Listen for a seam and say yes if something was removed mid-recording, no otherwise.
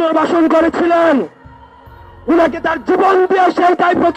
no